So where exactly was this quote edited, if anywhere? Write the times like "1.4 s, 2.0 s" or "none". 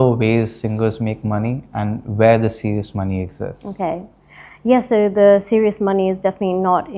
none